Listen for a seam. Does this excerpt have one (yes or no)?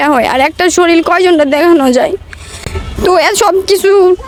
no